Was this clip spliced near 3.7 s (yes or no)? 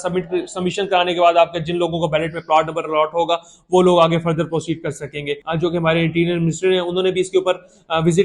no